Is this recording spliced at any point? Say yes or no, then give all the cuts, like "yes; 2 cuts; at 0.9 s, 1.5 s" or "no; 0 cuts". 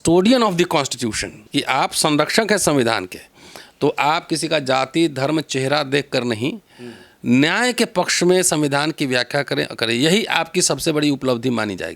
yes; 1 cut; at 1.3 s